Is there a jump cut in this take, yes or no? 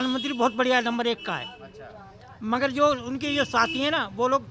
no